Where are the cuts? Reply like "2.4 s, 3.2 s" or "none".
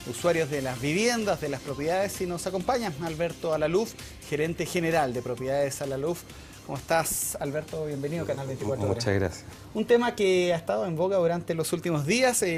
3.0 s